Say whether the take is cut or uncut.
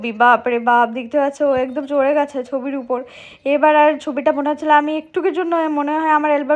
uncut